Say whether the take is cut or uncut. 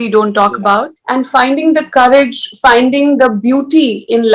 cut